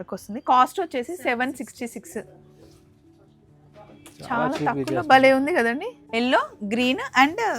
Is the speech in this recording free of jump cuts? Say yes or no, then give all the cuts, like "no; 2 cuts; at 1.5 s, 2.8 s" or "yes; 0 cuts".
no; 1 cut; at 6.0 s